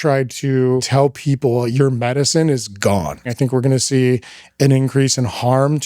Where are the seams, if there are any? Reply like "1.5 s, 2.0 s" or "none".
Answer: 0.9 s, 3.2 s